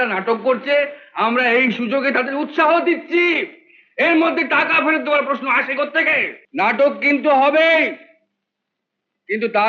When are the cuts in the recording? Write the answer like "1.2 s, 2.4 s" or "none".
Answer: 6.4 s